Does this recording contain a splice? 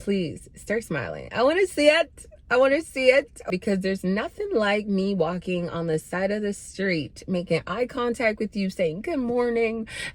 yes; 1 cut; at 3.5 s

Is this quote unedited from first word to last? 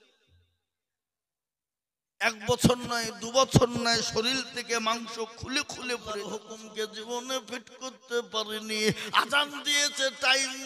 no; 1 cut; at 6.6 s

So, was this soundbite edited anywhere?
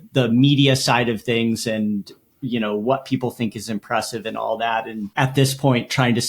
yes; 1 cut; at 5.1 s

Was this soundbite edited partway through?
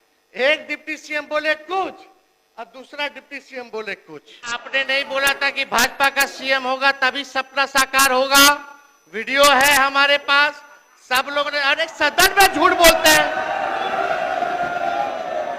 yes; 1 cut; at 4.6 s

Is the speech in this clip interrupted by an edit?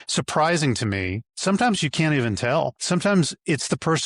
yes; 2 cuts; at 1.2 s, 2.8 s

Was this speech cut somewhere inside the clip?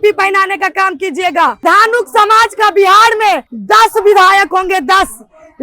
yes; 2 cuts; at 1.6 s, 3.5 s

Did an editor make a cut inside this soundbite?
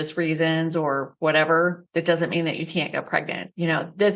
yes; 3 cuts; at 1.1 s, 1.8 s, 3.2 s

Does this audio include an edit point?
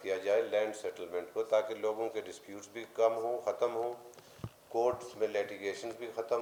no; 0 cuts

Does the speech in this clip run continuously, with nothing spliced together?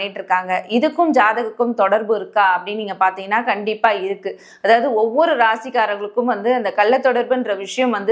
yes; 0 cuts

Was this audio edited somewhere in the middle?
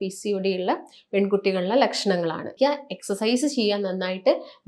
yes; 1 cut; at 2.5 s

